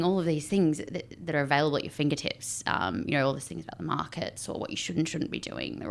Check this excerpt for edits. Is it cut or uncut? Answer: uncut